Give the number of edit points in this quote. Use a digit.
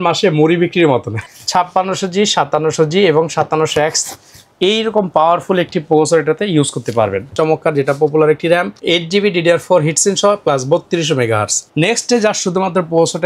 3